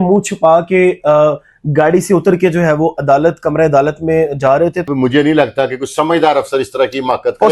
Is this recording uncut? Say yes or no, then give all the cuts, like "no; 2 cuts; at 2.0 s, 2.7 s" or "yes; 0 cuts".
no; 1 cut; at 4.8 s